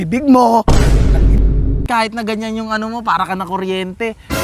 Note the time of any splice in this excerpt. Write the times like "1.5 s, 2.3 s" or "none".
1.9 s